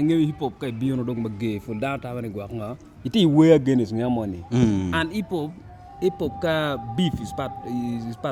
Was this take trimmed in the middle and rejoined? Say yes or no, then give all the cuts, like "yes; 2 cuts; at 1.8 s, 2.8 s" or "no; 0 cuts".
no; 0 cuts